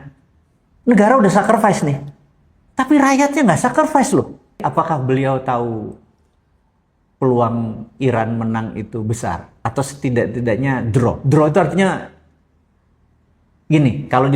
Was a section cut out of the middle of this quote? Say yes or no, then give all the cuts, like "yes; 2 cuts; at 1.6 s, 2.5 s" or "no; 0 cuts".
yes; 1 cut; at 4.6 s